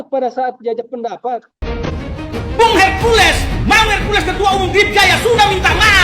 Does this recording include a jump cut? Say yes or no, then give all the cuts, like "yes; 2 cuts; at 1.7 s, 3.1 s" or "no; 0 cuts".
yes; 1 cut; at 1.5 s